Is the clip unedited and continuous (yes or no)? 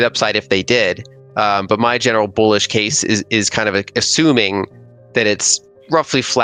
yes